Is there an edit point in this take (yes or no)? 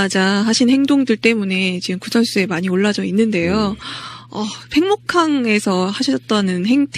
no